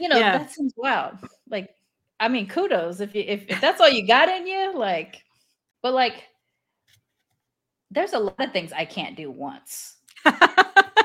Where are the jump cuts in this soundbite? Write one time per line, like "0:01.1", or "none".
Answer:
0:05.7